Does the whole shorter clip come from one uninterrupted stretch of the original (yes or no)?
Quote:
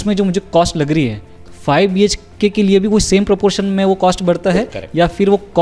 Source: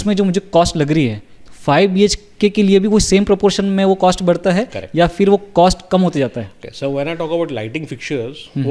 yes